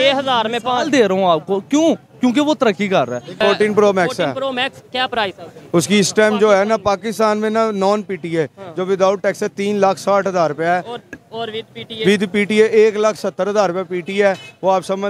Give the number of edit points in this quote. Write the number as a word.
one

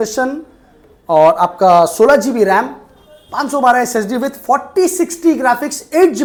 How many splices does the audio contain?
zero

